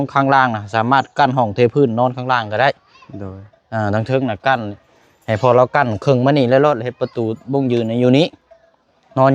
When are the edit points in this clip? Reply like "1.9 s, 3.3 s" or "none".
none